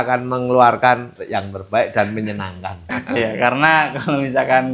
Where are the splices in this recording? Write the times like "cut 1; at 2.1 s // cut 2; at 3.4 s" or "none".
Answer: cut 1; at 1.2 s // cut 2; at 2.9 s